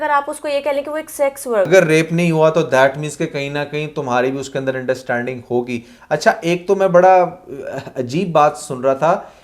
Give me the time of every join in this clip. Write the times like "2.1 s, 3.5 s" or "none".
1.7 s